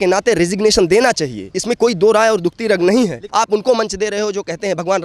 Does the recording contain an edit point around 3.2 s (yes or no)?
yes